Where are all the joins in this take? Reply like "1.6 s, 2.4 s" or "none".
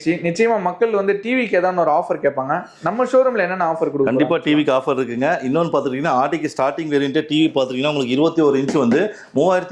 none